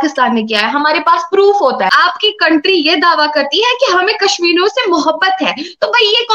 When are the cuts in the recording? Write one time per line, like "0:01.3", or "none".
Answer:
0:01.9

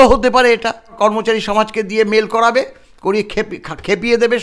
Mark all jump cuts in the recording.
0:01.0

